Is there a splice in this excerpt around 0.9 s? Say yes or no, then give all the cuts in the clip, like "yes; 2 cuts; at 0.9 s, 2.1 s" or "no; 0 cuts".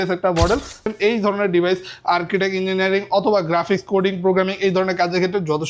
yes; 1 cut; at 0.9 s